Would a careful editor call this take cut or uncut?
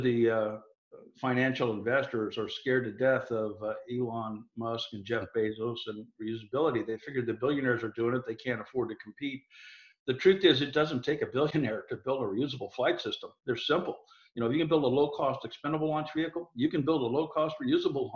cut